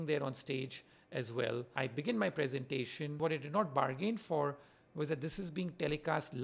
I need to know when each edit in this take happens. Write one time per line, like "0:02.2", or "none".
0:01.7
0:03.1